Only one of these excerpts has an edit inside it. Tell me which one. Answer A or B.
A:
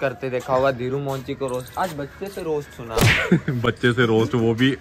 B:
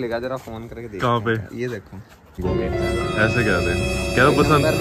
B